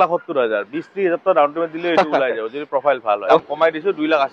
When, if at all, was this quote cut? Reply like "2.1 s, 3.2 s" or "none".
3.4 s